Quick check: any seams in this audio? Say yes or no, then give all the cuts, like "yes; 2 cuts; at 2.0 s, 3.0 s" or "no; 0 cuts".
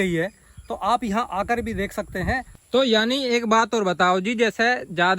yes; 1 cut; at 2.5 s